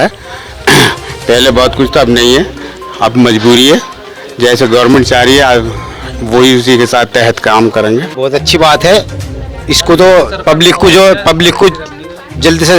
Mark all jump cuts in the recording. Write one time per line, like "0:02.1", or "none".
0:08.1